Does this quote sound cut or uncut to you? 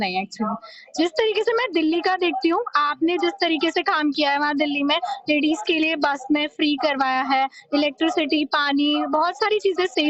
uncut